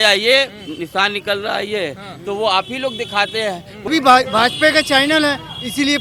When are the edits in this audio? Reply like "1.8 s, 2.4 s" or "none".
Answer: 3.9 s